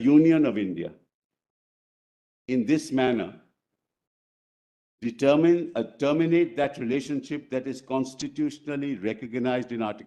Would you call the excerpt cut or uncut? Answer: uncut